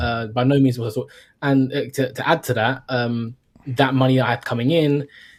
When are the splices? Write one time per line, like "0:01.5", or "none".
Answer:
none